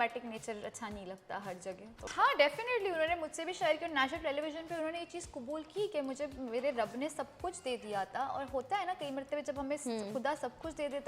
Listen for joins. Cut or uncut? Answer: cut